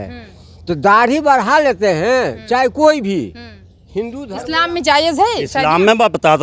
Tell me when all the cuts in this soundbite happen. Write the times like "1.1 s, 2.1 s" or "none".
4.2 s